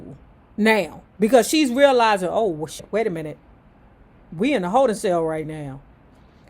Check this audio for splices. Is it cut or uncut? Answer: cut